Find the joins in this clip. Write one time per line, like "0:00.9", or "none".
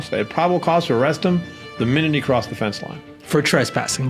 none